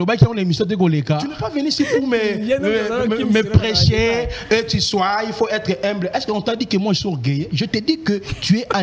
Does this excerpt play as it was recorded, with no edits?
no; 1 cut; at 1.4 s

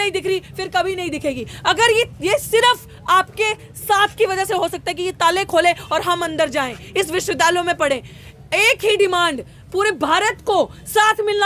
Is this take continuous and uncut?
yes; 0 cuts

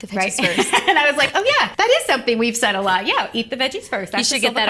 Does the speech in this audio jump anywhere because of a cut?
yes; 1 cut; at 1.7 s

